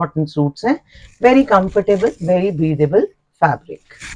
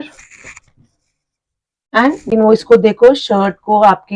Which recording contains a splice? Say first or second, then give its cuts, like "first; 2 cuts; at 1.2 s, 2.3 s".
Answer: second; 1 cut; at 2.3 s